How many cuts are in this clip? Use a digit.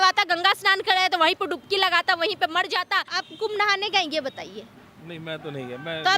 1